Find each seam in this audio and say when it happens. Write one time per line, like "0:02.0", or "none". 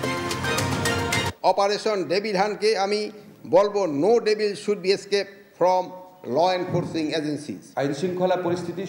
0:01.3
0:07.6